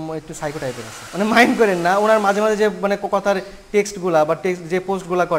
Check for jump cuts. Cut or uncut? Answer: cut